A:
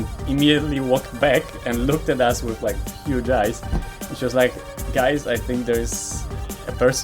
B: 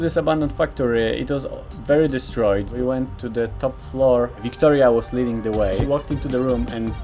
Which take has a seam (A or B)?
B